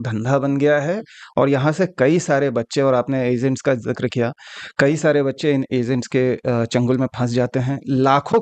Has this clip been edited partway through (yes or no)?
no